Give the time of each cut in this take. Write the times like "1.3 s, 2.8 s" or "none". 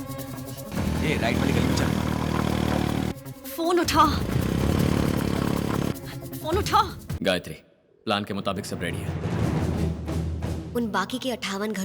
7.0 s